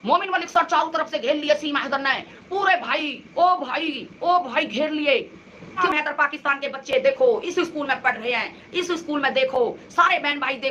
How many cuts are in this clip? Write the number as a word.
one